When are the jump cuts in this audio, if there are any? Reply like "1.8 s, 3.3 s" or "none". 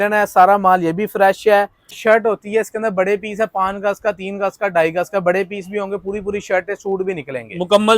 1.9 s